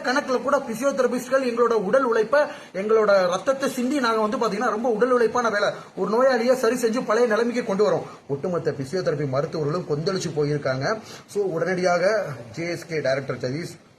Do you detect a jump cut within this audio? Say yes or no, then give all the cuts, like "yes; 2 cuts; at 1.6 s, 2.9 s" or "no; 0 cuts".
yes; 1 cut; at 8.1 s